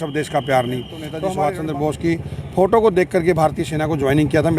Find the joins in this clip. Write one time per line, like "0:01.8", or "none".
0:01.1